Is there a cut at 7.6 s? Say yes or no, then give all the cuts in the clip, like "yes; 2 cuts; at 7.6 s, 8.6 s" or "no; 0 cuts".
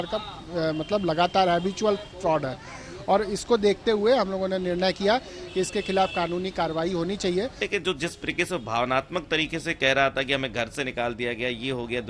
yes; 1 cut; at 7.6 s